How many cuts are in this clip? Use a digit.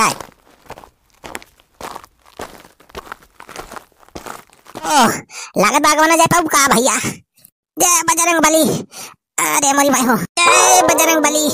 1